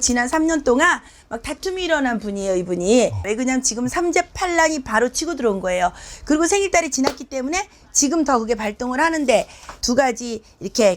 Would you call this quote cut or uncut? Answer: uncut